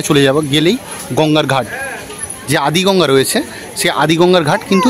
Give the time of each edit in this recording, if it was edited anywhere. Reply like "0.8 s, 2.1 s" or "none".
none